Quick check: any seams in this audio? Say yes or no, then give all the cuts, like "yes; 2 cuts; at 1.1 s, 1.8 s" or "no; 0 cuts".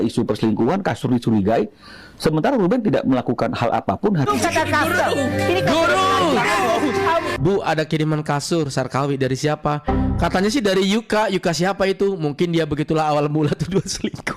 yes; 2 cuts; at 4.3 s, 7.3 s